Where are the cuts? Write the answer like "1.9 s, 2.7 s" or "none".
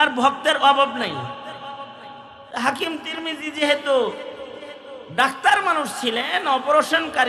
2.3 s

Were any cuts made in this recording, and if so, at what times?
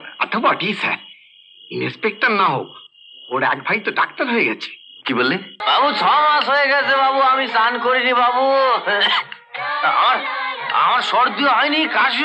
5.5 s

